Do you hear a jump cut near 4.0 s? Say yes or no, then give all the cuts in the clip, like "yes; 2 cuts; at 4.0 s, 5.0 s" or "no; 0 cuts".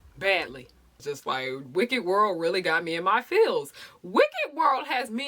no; 1 cut; at 1.0 s